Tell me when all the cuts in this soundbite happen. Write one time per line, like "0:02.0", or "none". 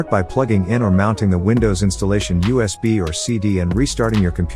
none